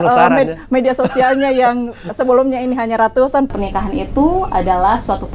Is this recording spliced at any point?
yes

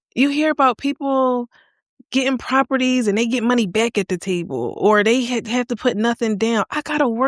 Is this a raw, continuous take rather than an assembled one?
yes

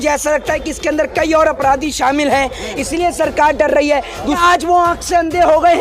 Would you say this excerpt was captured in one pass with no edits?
no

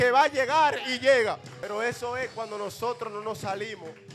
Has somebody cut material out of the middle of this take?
yes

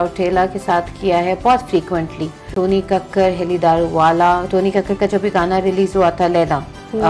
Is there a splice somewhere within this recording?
yes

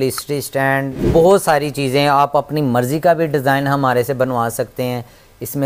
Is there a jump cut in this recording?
yes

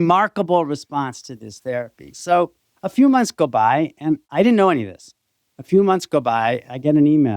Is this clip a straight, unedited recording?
no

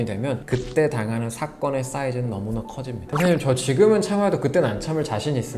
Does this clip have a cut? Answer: yes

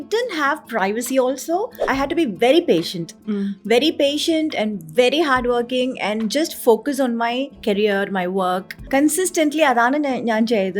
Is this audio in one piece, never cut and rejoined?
no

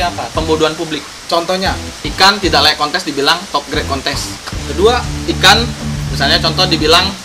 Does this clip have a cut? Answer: yes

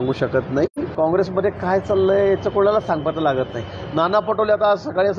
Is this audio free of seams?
no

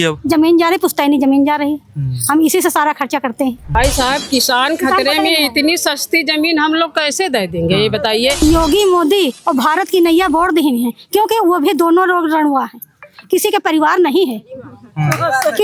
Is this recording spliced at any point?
yes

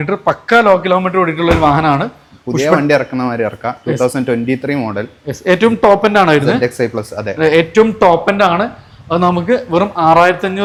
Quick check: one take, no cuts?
yes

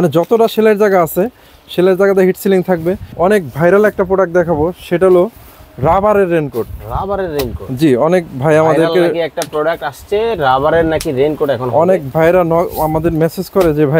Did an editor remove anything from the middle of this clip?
yes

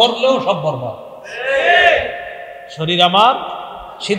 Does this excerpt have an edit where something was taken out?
no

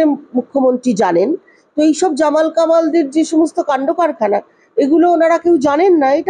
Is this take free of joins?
yes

